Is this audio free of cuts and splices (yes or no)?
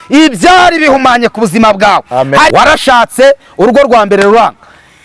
no